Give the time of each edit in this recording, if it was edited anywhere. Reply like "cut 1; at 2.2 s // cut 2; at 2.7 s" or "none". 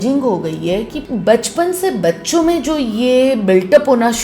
cut 1; at 1.0 s